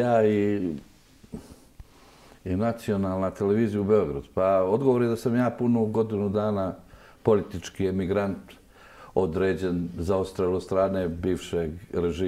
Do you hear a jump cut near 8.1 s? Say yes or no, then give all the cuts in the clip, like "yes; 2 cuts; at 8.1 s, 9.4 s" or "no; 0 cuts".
no; 0 cuts